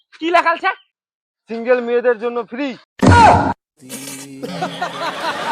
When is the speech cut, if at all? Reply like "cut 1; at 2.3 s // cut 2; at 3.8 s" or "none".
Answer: cut 1; at 2.8 s // cut 2; at 3.8 s